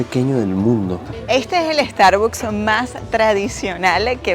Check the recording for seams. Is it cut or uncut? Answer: cut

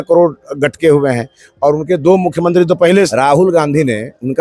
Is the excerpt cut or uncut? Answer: cut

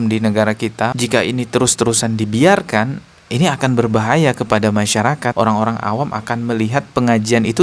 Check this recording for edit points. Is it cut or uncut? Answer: cut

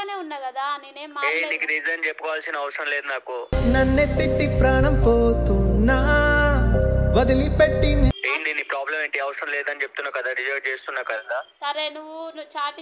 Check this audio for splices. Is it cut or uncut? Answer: uncut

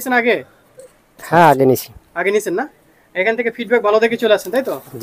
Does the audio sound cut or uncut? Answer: uncut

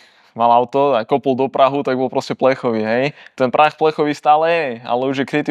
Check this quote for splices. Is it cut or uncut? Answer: uncut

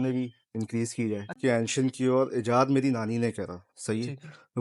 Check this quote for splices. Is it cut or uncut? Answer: cut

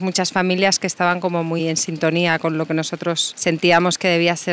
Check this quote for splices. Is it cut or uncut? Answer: uncut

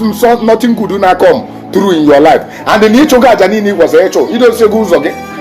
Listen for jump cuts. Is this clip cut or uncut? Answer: uncut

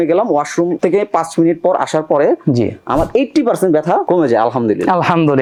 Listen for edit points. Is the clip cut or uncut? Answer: uncut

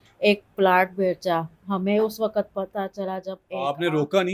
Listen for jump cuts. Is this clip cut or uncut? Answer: uncut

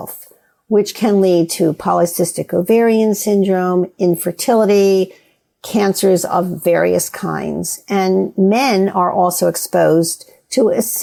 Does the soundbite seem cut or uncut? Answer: uncut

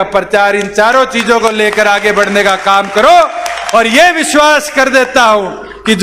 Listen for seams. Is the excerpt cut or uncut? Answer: uncut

